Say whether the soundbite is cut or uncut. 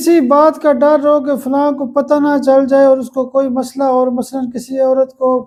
uncut